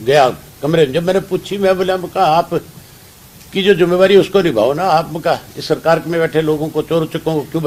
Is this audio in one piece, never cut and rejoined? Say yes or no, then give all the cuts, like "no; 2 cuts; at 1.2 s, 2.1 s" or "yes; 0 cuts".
yes; 0 cuts